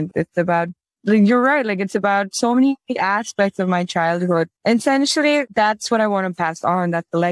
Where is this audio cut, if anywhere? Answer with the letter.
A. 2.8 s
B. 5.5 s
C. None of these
B